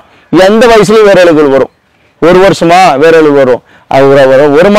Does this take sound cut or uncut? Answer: uncut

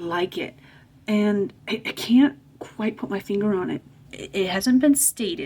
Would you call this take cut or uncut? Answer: cut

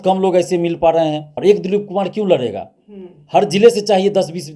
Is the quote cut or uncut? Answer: cut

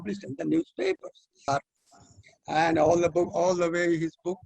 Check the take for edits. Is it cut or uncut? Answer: cut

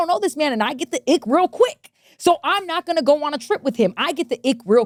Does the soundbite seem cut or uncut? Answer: uncut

